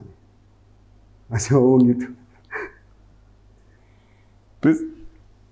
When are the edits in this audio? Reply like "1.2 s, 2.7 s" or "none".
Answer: none